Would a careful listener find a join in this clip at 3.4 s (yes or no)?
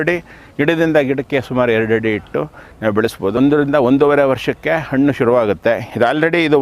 yes